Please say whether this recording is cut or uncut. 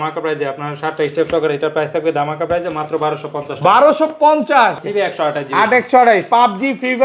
cut